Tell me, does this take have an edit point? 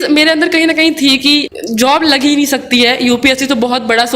yes; 1 cut; at 1.5 s

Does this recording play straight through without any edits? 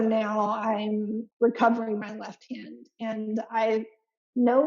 no; 1 cut; at 1.2 s

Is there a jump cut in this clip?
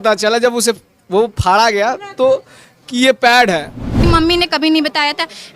yes; 1 cut; at 3.9 s

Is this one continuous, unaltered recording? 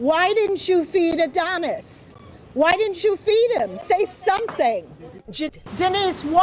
no; 1 cut; at 5.5 s

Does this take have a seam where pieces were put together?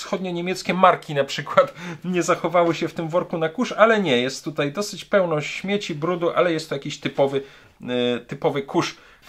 no; 0 cuts

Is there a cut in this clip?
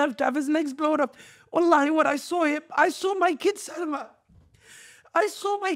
no; 0 cuts

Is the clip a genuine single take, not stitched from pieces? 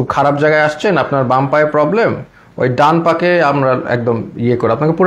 yes; 0 cuts

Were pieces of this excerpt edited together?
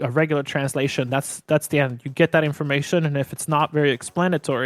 no; 0 cuts

